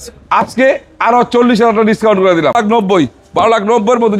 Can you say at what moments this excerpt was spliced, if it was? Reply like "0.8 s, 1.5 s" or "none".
2.5 s